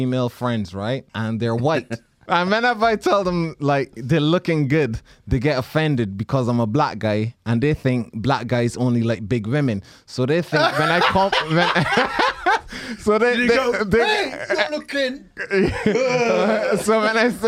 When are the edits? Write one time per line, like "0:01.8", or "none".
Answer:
0:01.1
0:02.1